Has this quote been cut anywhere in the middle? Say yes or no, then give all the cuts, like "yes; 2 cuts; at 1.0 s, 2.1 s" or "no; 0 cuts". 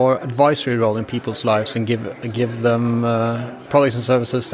no; 0 cuts